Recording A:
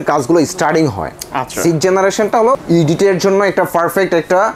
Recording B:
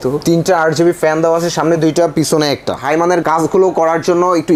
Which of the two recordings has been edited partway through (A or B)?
B